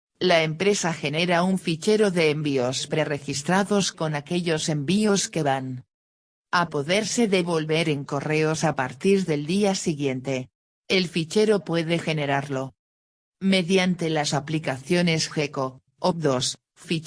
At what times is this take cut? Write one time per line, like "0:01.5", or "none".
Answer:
0:01.0